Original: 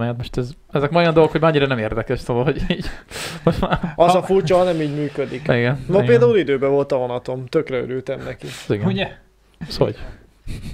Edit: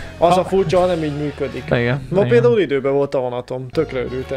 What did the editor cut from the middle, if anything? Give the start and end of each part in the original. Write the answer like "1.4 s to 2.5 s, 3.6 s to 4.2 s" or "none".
none